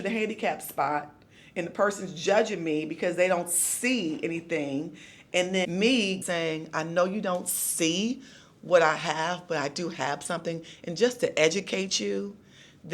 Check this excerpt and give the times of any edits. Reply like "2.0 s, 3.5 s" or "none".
5.6 s